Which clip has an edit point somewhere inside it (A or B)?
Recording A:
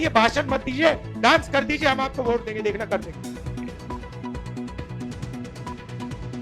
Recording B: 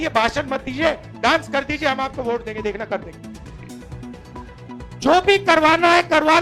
A